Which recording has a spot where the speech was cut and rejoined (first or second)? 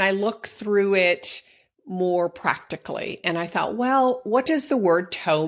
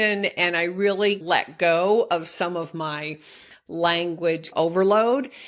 second